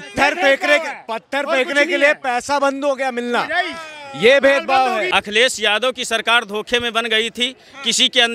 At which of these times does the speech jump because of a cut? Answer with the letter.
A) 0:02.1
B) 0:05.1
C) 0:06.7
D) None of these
B